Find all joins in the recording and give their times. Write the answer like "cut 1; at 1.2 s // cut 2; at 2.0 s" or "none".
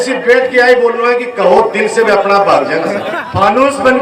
cut 1; at 3.0 s